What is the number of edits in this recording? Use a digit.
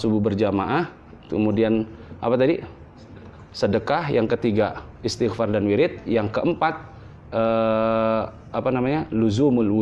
0